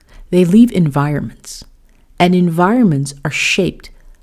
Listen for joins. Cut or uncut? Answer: uncut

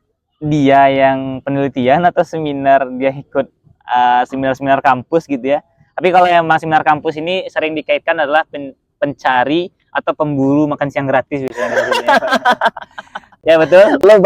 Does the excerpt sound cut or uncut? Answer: uncut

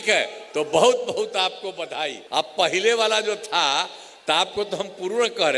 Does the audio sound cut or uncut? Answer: cut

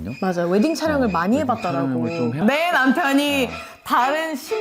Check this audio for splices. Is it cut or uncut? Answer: cut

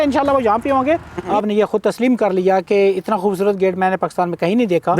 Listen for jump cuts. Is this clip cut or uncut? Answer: cut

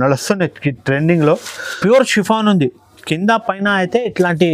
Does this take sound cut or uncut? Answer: cut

